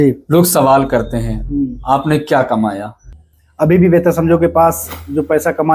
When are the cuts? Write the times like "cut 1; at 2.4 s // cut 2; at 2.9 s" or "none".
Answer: cut 1; at 3.1 s